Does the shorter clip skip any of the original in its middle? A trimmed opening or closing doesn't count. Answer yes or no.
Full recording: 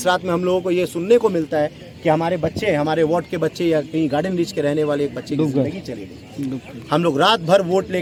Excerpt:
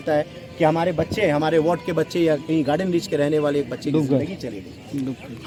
no